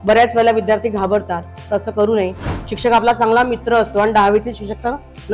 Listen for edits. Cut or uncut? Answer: uncut